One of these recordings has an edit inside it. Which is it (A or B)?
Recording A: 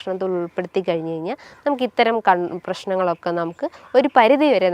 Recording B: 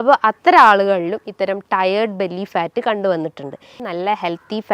B